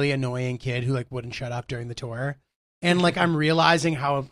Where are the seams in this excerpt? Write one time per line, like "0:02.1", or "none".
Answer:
none